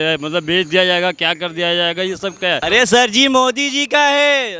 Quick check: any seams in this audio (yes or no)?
yes